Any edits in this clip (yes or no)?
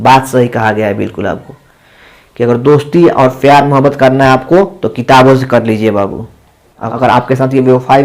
yes